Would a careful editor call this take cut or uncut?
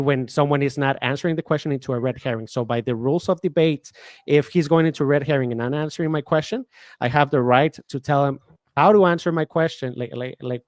uncut